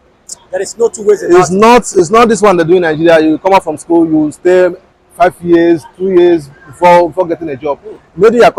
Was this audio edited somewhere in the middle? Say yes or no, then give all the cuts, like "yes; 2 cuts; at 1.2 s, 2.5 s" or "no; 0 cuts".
no; 0 cuts